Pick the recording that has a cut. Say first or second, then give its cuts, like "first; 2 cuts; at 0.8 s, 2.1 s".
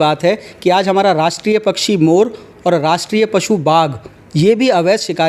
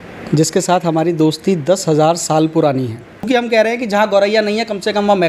second; 1 cut; at 3.3 s